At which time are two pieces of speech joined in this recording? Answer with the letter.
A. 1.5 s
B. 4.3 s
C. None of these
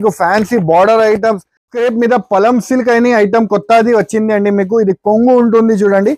A